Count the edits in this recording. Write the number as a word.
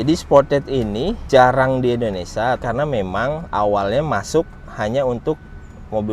two